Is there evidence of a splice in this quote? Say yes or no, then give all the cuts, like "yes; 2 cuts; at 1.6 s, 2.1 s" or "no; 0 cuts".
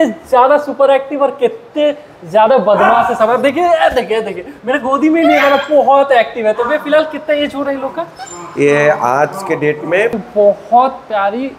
yes; 1 cut; at 10.2 s